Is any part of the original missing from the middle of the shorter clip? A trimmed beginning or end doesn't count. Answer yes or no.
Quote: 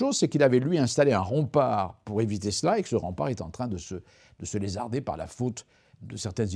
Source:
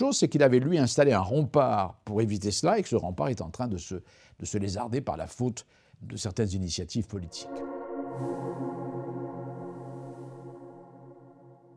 no